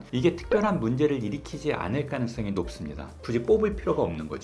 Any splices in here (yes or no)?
yes